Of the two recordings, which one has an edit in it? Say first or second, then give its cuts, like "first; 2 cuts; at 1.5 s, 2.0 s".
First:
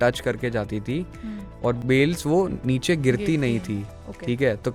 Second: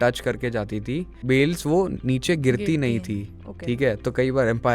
second; 1 cut; at 1.2 s